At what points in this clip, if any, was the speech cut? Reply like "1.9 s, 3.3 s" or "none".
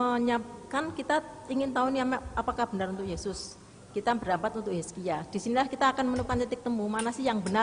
none